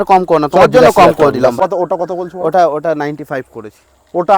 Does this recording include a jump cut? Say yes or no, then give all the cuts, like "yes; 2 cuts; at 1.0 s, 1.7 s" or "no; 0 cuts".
yes; 1 cut; at 1.6 s